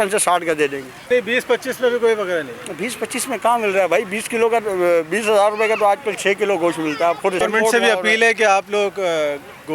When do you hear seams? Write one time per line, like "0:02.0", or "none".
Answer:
0:01.1
0:07.4